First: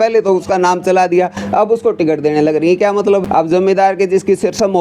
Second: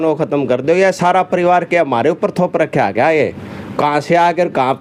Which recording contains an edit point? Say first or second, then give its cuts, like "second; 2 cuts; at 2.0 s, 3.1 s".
first; 1 cut; at 3.2 s